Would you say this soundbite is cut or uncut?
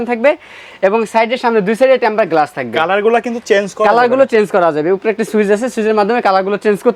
uncut